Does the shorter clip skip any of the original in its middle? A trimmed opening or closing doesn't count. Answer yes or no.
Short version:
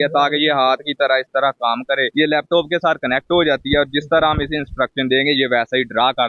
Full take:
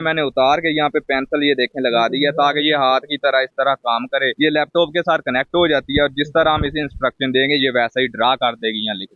no